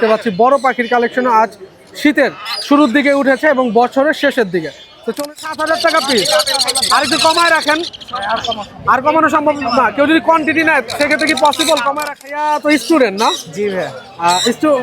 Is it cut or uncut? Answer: cut